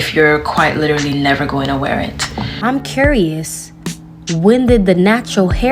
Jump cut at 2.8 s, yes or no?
yes